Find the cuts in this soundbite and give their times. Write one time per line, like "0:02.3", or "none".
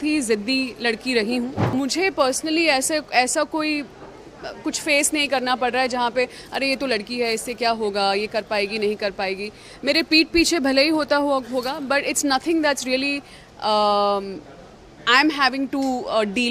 0:01.6